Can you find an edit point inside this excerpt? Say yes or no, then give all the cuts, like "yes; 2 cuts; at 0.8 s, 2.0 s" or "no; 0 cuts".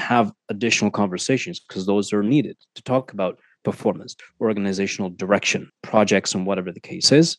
yes; 2 cuts; at 4.1 s, 5.8 s